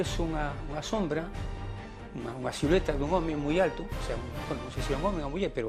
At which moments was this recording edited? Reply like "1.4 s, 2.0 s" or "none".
none